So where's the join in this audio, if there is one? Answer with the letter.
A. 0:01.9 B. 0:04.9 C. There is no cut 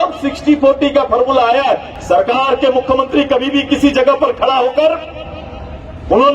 A